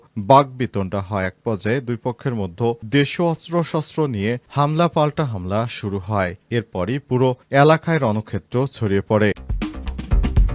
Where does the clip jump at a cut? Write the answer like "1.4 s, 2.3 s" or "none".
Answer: 9.5 s